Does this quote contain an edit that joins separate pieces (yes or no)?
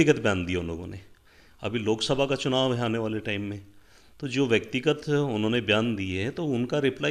no